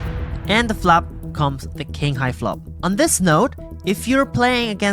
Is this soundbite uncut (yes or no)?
yes